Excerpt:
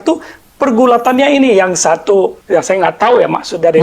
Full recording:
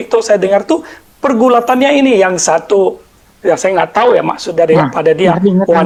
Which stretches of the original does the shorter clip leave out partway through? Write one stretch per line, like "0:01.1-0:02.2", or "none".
0:03.0-0:03.3